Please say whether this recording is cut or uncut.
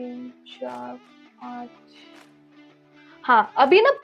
uncut